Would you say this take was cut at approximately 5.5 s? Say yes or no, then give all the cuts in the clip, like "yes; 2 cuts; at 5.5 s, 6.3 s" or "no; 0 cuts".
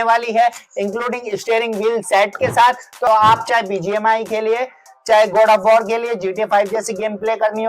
no; 1 cut; at 3.0 s